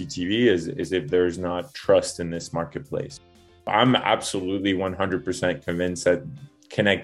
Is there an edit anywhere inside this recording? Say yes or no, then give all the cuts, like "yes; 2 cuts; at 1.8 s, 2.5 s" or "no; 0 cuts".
yes; 1 cut; at 3.6 s